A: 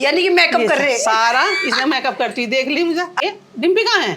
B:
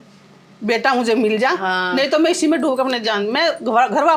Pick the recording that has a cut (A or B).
A